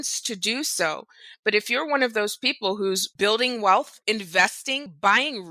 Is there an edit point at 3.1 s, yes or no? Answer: yes